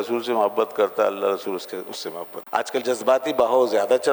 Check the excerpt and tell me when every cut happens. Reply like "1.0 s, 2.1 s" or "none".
2.3 s